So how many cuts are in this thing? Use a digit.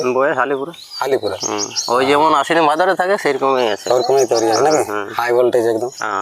1